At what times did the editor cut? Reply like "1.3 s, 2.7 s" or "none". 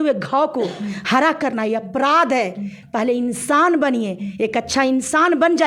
none